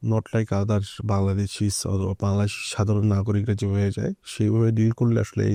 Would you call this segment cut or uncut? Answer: uncut